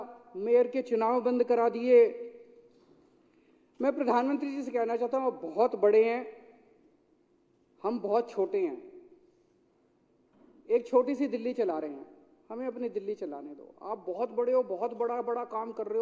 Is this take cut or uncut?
uncut